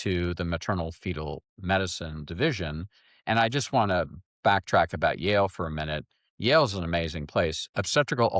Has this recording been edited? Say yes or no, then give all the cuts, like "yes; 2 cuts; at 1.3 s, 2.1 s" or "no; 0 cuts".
no; 0 cuts